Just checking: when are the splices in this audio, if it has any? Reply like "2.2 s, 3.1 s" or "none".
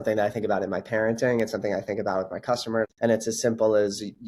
2.9 s